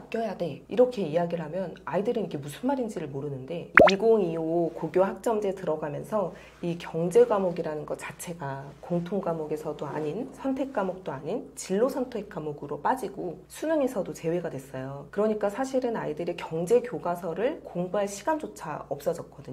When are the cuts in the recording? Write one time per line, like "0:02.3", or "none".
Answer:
0:03.7